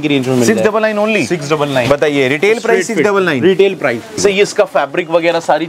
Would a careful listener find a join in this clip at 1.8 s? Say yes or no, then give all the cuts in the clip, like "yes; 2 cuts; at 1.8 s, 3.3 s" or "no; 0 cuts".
no; 1 cut; at 4.2 s